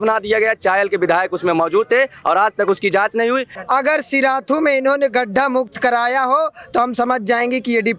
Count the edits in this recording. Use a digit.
1